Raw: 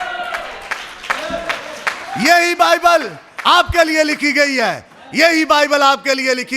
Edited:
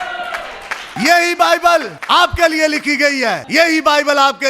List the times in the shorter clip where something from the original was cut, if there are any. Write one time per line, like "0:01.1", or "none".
0:01.0
0:02.0
0:03.4